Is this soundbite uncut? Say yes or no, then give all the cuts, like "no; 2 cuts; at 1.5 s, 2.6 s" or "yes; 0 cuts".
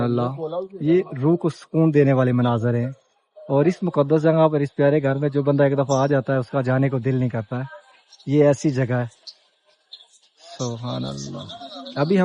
yes; 0 cuts